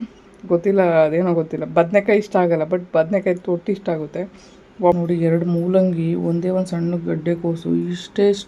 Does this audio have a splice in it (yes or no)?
yes